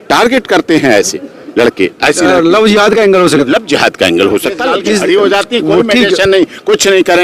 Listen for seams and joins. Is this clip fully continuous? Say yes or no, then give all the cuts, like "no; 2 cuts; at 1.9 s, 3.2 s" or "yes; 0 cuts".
no; 1 cut; at 4.7 s